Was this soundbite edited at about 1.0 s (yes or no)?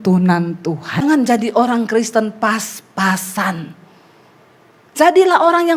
yes